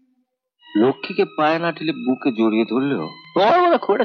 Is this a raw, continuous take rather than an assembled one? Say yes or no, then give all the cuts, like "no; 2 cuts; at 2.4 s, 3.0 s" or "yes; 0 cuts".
no; 1 cut; at 3.2 s